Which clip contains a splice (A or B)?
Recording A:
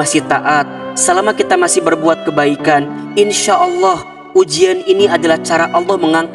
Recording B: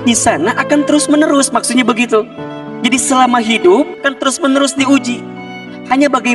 B